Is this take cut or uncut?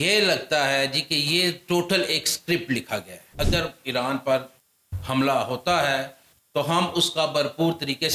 cut